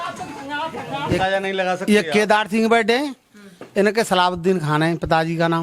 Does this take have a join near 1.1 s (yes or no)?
yes